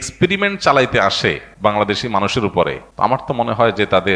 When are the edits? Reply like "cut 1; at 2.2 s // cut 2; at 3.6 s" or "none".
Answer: cut 1; at 1.5 s // cut 2; at 2.8 s